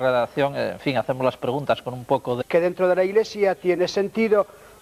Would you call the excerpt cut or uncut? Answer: uncut